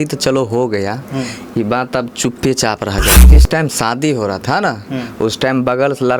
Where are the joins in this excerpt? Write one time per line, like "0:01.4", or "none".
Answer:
0:03.3